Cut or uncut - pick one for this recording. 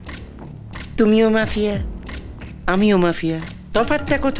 uncut